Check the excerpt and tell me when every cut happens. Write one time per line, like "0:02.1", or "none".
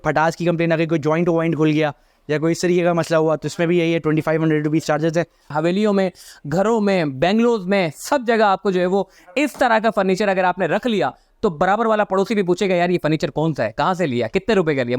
0:05.5